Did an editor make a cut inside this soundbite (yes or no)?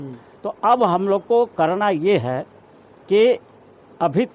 no